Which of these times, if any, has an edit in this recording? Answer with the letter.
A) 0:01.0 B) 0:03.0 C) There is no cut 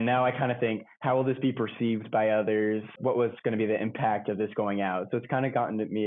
B